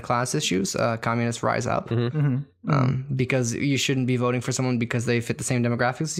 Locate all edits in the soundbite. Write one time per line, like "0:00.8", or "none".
none